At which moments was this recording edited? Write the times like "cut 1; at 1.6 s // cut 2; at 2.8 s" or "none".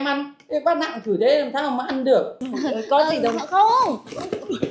cut 1; at 2.4 s